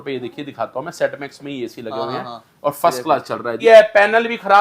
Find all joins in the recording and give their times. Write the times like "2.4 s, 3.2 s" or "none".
3.5 s